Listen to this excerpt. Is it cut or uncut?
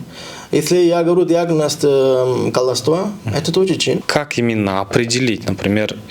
cut